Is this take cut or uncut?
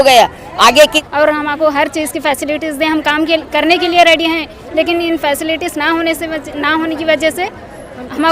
cut